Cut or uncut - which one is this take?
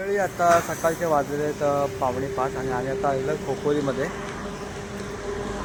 uncut